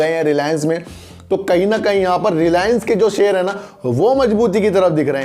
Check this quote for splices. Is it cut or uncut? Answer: uncut